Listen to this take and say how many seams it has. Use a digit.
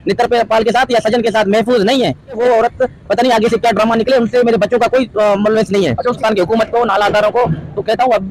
2